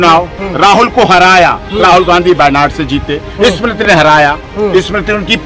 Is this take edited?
no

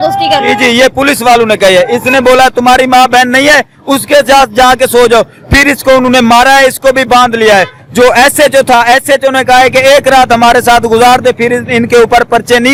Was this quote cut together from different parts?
no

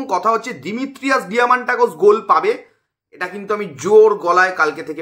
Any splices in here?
no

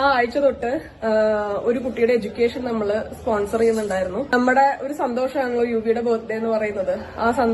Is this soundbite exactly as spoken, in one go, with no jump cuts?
no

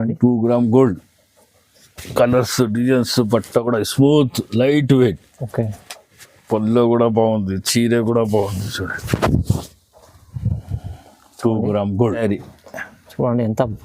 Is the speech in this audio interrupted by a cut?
yes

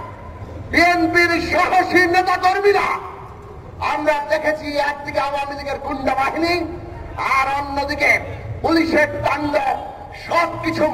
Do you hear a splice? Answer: no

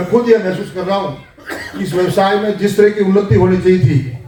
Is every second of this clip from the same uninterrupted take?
yes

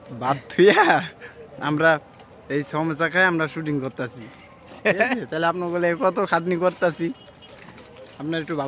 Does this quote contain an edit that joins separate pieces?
no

